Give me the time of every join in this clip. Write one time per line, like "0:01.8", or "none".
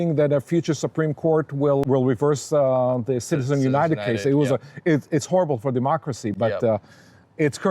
0:01.8